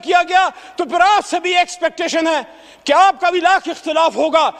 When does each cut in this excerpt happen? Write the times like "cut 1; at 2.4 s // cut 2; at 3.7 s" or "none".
none